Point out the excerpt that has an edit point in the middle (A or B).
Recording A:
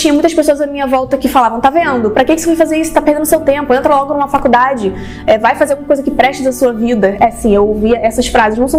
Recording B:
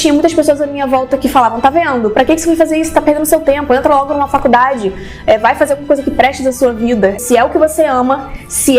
B